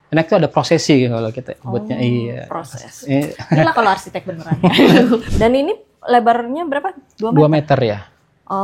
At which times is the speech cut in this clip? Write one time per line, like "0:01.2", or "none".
0:05.3